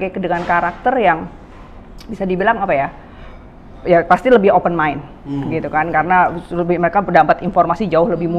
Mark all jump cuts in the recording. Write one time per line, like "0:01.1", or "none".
none